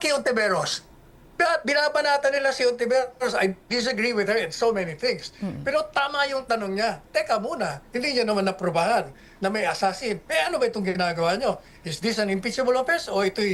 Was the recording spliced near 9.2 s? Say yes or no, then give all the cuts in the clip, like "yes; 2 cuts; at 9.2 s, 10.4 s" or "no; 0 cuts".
no; 0 cuts